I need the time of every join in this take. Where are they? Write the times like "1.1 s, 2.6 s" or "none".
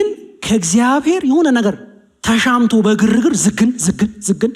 none